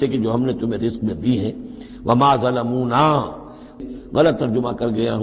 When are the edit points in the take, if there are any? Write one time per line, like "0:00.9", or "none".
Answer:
0:03.8